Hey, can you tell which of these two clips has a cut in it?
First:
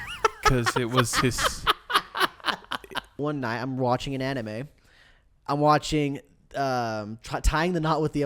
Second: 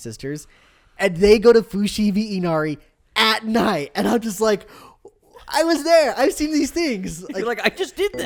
first; 1 cut; at 3.2 s

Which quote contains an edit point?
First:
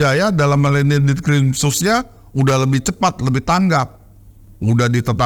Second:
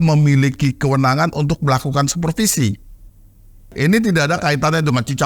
second; 1 cut; at 3.7 s

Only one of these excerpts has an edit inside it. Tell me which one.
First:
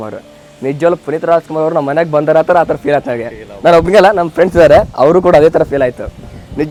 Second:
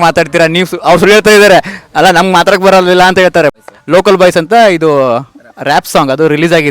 second; 1 cut; at 3.7 s

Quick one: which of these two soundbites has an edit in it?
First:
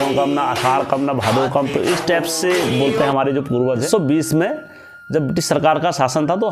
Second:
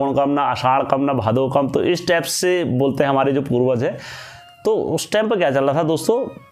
first; 1 cut; at 3.9 s

